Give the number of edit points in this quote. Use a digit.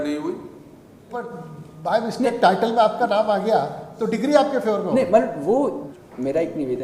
2